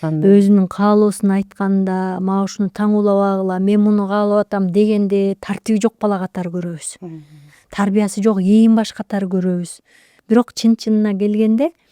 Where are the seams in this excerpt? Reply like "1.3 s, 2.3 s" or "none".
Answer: none